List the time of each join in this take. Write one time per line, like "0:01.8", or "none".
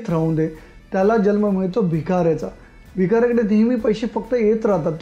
none

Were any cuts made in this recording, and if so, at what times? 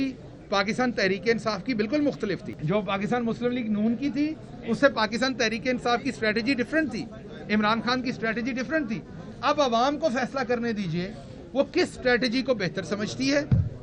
0:02.5

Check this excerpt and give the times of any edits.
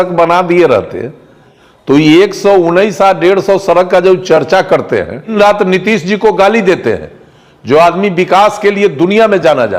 0:05.3

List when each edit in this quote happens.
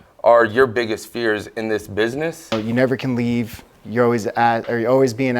0:02.5

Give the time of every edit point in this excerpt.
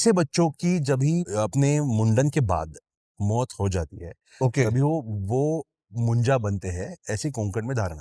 0:01.3

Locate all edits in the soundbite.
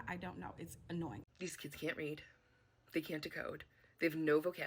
0:01.2

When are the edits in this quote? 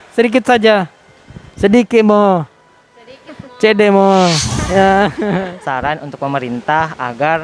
0:05.5

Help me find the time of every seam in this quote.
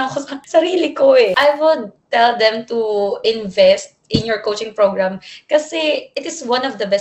0:01.3

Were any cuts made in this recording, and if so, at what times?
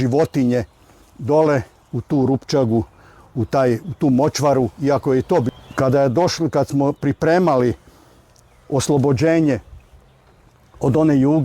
0:05.5

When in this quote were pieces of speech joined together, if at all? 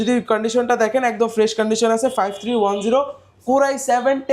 none

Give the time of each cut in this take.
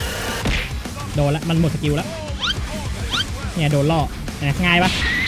none

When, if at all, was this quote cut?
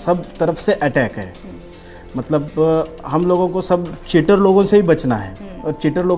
none

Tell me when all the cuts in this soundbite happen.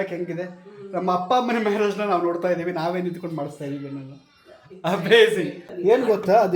0:05.4

